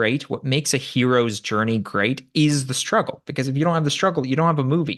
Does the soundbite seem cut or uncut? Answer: uncut